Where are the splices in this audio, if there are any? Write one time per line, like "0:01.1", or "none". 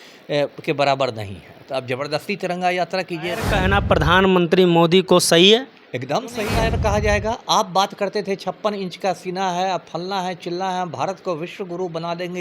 0:03.5
0:06.5

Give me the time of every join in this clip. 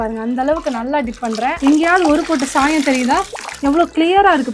0:01.6
0:03.4

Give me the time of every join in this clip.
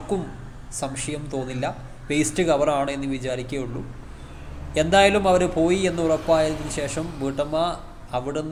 none

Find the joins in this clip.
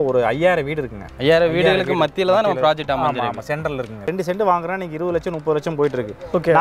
0:04.1

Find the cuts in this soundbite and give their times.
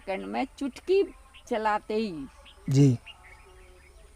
0:01.3

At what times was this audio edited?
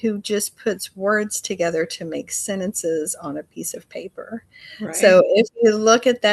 none

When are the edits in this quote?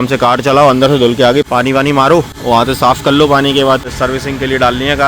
0:02.3
0:03.9

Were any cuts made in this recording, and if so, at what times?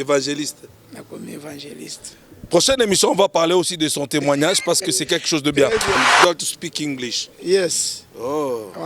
0:05.9

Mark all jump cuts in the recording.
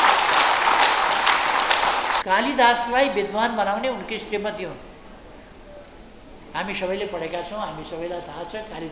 0:02.2

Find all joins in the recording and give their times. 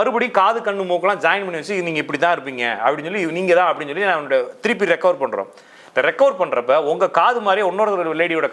none

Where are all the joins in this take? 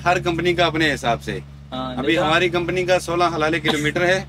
none

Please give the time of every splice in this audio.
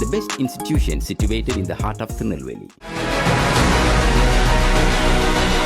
0:02.9

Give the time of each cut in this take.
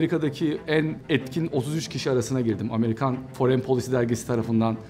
0:01.0
0:03.3

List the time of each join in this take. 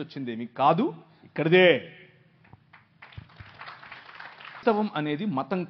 0:04.6

